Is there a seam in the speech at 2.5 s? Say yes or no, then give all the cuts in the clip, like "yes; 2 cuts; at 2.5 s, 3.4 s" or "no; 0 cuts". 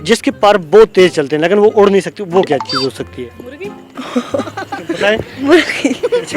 no; 1 cut; at 4.0 s